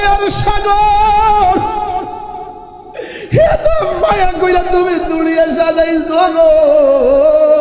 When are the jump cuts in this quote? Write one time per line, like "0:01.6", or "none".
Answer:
none